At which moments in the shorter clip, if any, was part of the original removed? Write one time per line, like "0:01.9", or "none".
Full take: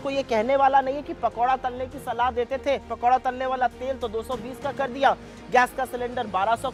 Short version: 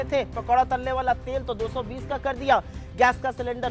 none